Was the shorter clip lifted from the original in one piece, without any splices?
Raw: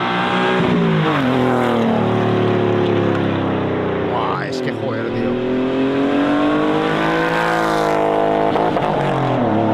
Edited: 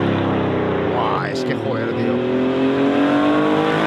yes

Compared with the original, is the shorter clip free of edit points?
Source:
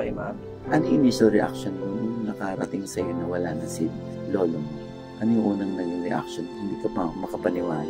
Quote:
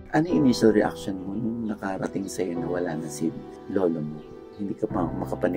no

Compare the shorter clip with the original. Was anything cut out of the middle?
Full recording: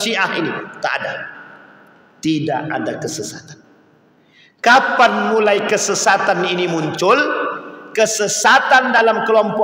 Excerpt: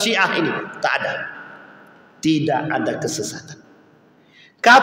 no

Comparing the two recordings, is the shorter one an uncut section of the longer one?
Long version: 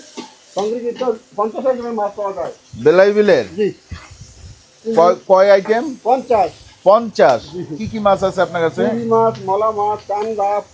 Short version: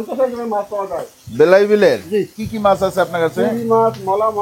no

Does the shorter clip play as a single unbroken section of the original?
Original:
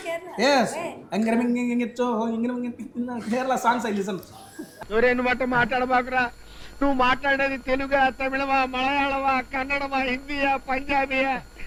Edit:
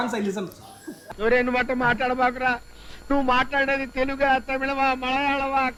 yes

